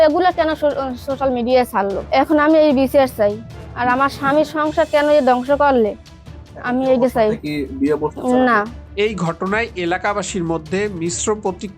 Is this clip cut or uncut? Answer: uncut